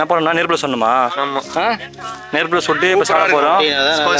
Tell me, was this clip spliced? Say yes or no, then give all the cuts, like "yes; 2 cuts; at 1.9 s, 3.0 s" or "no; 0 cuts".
no; 0 cuts